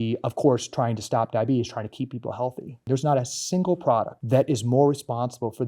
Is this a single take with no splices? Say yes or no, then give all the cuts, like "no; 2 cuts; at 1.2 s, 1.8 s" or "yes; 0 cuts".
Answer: no; 2 cuts; at 2.8 s, 4.2 s